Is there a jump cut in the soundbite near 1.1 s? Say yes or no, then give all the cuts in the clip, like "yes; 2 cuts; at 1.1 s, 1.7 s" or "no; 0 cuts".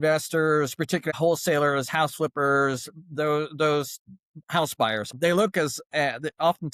yes; 2 cuts; at 1.1 s, 5.1 s